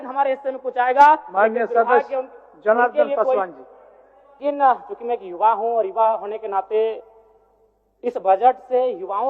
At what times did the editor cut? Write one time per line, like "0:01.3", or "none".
0:04.4